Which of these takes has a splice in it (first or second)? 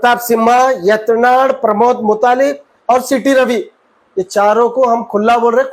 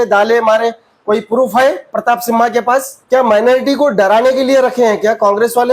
second